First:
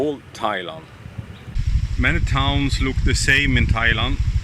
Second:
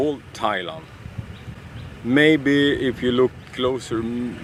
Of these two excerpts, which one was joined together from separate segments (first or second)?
first